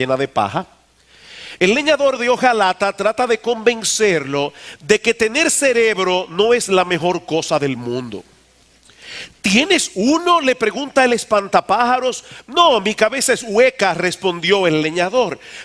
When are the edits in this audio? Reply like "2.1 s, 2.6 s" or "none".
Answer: none